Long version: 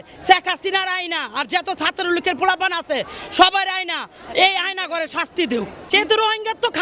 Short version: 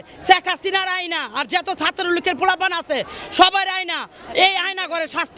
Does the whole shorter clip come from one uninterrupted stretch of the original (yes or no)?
yes